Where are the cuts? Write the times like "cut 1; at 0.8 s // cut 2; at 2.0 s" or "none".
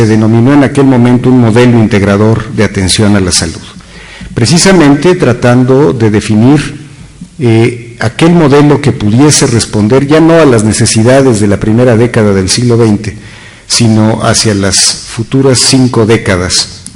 cut 1; at 3.4 s